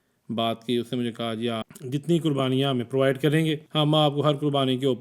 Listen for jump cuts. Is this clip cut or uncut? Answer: cut